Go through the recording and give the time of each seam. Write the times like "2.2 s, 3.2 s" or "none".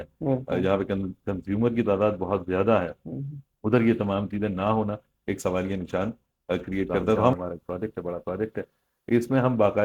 7.3 s